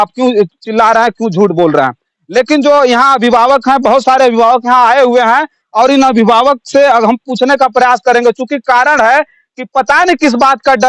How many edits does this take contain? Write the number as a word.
zero